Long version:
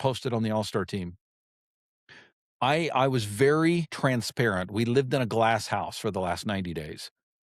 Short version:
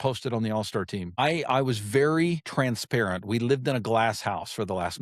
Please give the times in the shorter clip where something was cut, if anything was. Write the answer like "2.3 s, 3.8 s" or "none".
1.2 s